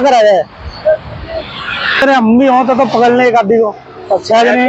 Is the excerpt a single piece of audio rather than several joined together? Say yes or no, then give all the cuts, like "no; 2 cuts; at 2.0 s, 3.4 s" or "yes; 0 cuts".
no; 1 cut; at 2.0 s